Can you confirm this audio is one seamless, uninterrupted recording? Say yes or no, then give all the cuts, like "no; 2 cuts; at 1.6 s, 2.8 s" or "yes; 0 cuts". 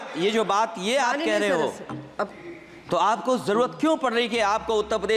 yes; 0 cuts